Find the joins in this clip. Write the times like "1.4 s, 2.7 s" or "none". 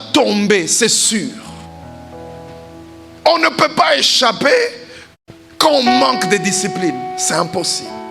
none